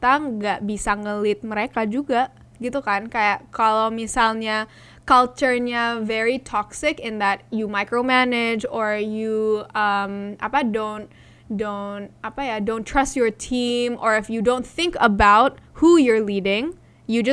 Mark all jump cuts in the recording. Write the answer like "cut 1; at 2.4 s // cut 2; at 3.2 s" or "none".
none